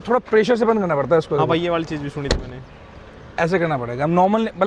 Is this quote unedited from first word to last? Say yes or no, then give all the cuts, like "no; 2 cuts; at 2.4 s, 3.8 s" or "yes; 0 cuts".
yes; 0 cuts